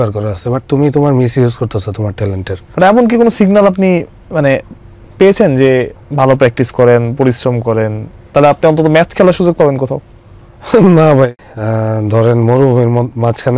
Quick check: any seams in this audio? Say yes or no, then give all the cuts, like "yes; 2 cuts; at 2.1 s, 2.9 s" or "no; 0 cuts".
yes; 3 cuts; at 2.6 s, 6.0 s, 11.3 s